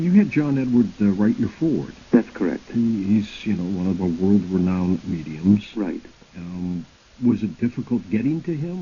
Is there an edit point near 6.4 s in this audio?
yes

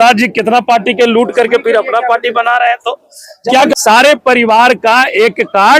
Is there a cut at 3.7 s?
yes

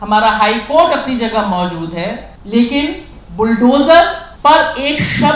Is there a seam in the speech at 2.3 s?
yes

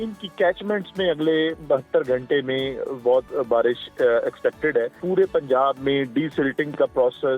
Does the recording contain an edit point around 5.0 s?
yes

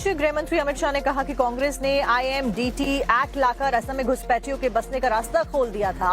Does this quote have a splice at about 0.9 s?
yes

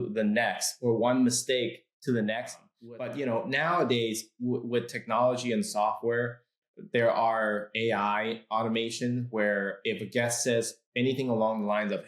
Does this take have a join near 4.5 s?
no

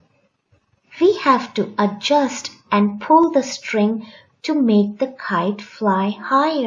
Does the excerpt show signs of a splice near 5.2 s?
no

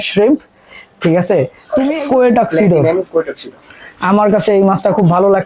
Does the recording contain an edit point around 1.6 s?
yes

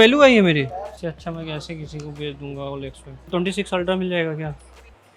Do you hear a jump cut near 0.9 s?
yes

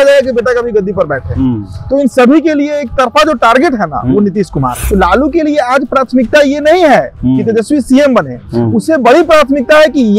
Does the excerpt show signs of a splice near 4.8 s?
yes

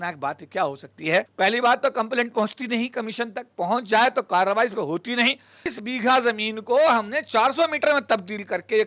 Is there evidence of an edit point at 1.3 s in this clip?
yes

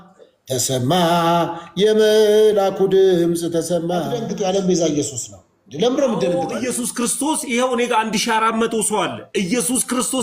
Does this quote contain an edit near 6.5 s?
yes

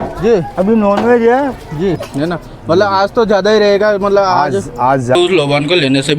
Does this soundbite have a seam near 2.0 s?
yes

